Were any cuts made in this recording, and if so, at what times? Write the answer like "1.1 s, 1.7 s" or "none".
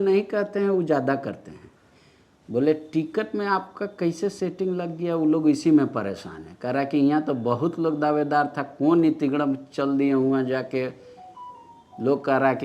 none